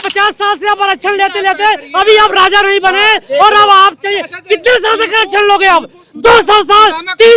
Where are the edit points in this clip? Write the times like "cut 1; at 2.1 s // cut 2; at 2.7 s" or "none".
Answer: none